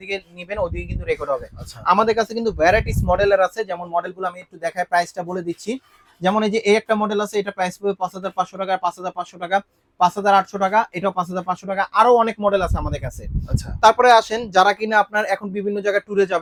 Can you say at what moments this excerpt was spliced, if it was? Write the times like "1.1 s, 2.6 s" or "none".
none